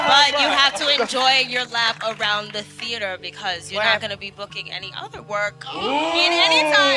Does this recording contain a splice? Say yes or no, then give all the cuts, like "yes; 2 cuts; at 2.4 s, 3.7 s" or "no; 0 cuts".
no; 0 cuts